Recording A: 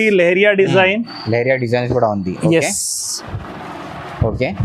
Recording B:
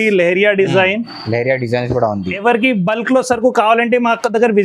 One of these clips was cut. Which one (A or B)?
B